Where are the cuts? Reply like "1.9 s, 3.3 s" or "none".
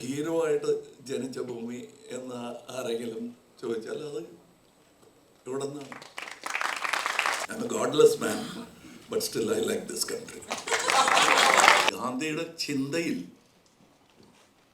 7.5 s, 11.9 s